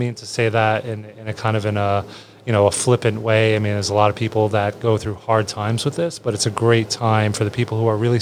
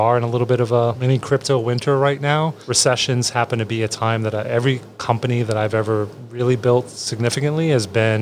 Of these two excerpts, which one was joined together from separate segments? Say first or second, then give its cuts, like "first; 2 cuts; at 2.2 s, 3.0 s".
second; 2 cuts; at 1.0 s, 2.6 s